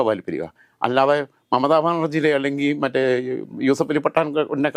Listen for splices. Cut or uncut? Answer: uncut